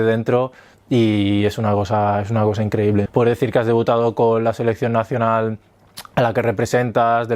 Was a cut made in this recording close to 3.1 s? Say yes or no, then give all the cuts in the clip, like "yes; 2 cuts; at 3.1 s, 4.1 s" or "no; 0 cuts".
yes; 1 cut; at 3.1 s